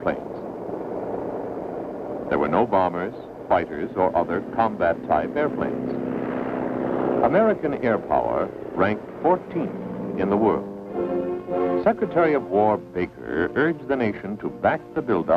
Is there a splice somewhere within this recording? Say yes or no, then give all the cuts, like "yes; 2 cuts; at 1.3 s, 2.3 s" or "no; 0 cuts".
no; 0 cuts